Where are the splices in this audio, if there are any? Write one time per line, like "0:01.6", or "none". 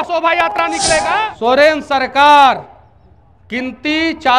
0:01.1

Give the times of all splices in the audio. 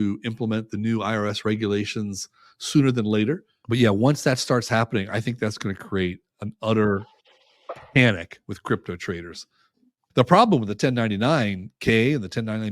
0:03.5
0:10.0

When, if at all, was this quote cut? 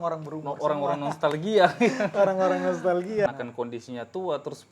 0:03.3

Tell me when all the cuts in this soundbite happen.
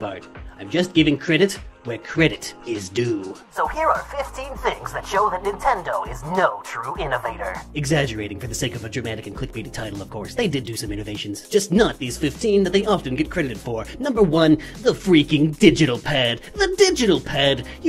0:07.1

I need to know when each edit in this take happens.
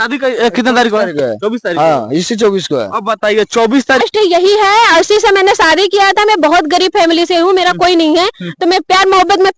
0:04.0

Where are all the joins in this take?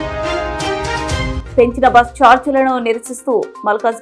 0:01.4

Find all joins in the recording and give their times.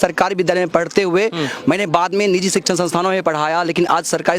none

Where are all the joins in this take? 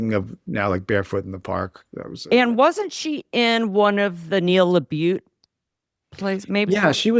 none

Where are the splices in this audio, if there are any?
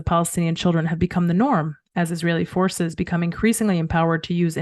none

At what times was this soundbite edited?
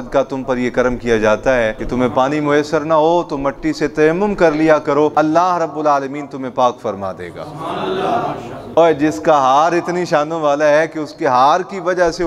0:01.8
0:05.1

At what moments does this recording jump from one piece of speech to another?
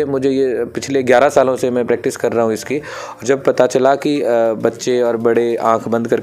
none

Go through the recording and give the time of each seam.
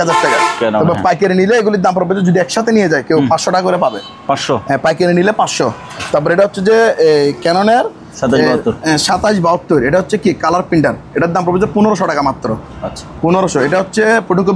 none

